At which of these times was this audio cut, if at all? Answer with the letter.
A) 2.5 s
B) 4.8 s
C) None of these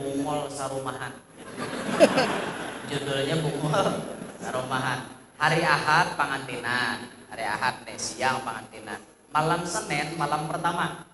A